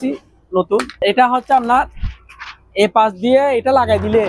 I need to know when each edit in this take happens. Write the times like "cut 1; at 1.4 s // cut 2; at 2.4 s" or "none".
cut 1; at 0.9 s